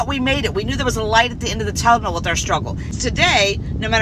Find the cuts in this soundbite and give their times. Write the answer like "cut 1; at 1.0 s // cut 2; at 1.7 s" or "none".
cut 1; at 2.9 s